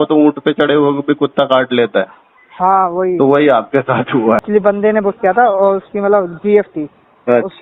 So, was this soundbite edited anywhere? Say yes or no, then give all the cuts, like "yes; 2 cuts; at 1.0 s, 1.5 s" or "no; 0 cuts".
yes; 1 cut; at 4.4 s